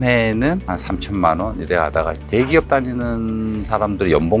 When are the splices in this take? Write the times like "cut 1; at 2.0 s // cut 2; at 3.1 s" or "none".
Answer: cut 1; at 2.2 s